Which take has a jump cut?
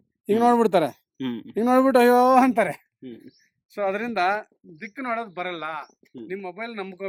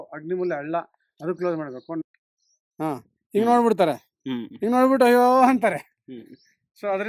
second; 1 cut; at 2.0 s

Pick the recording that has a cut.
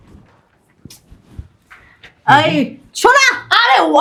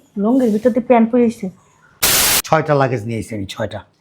second; 1 cut; at 2.2 s

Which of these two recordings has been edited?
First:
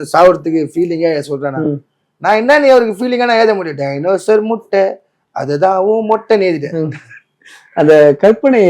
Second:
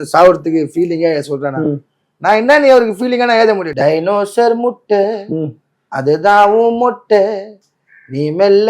second; 1 cut; at 3.7 s

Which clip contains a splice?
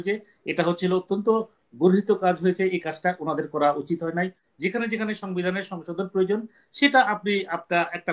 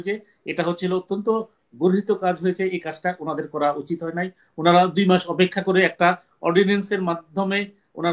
first; 1 cut; at 4.4 s

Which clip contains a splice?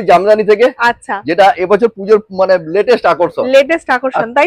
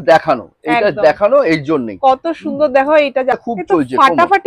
second; 1 cut; at 3.5 s

